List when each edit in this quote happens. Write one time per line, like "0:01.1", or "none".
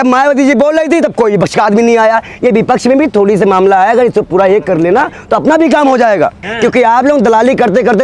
0:06.5